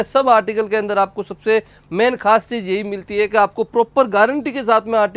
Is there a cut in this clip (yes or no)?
no